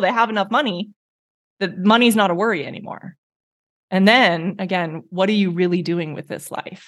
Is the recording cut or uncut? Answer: uncut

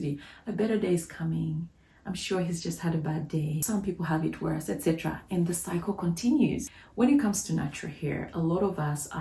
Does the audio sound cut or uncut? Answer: cut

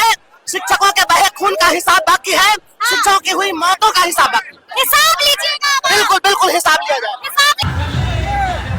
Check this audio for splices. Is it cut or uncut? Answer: cut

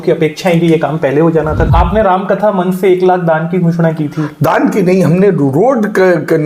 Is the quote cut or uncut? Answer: cut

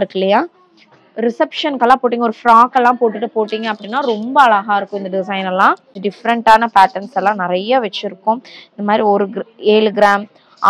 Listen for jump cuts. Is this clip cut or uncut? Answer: cut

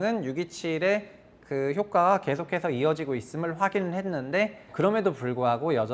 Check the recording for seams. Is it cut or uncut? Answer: cut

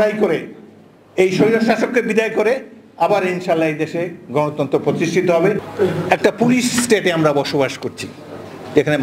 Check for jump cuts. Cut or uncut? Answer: cut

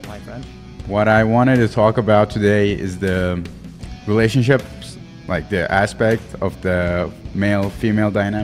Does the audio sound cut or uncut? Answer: uncut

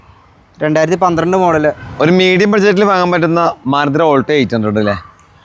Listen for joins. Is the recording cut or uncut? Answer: cut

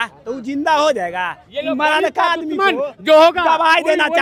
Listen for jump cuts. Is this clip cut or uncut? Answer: uncut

